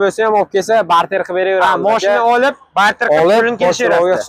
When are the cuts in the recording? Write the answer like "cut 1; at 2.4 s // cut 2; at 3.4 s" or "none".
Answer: none